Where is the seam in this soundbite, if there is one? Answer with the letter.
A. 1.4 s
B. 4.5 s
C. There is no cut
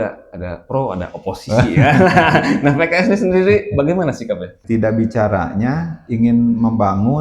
B